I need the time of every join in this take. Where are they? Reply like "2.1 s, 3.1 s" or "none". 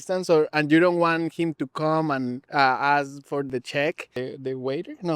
2.4 s, 3.5 s, 4.1 s